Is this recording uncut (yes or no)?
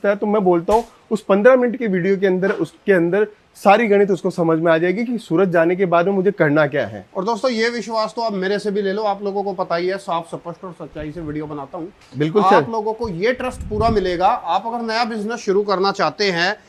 yes